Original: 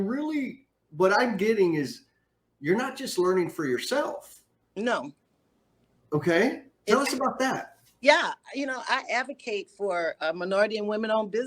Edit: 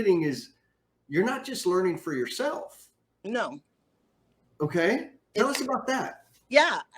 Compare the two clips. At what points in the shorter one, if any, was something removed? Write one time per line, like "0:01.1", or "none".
none